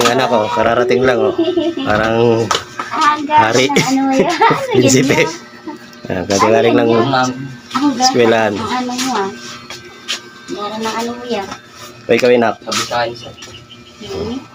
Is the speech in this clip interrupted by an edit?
no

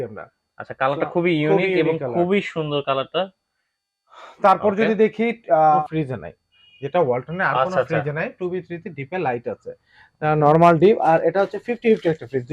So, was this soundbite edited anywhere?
yes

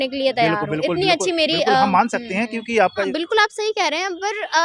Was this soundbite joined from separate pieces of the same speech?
yes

